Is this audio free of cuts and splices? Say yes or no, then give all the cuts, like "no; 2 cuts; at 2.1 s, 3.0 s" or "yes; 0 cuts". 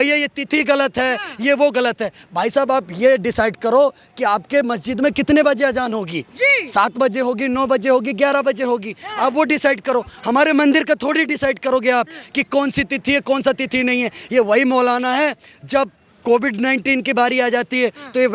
yes; 0 cuts